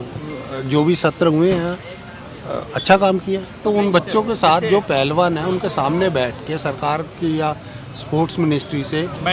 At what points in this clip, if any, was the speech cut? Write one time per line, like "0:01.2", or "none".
0:03.6